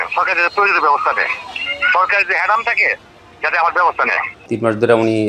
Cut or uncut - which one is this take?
cut